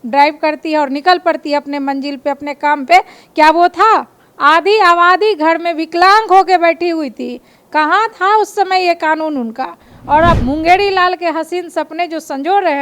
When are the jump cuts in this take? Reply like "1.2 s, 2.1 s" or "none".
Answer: 10.4 s